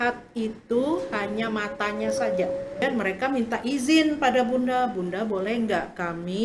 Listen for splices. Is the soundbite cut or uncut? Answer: cut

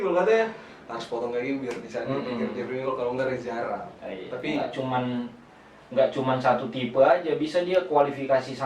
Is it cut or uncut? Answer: cut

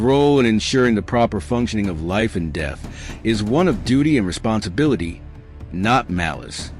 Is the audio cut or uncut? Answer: uncut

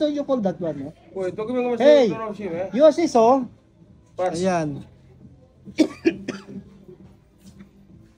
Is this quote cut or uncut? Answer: uncut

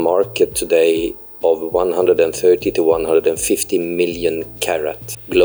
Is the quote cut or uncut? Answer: uncut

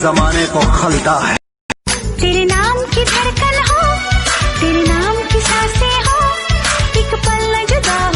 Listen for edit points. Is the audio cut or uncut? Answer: cut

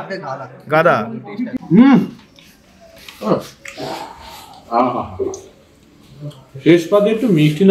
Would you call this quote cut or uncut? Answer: cut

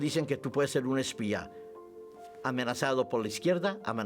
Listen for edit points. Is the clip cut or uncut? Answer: uncut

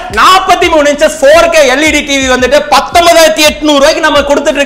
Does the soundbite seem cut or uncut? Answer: uncut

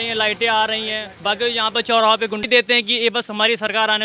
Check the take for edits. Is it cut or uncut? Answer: cut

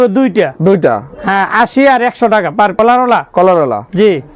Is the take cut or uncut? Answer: cut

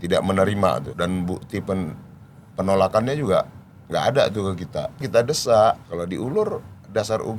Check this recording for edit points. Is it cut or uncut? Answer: cut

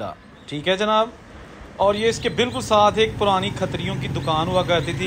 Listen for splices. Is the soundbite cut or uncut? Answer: uncut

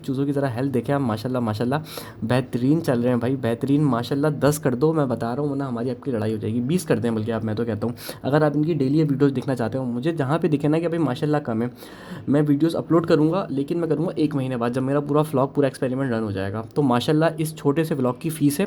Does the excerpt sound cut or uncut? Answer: uncut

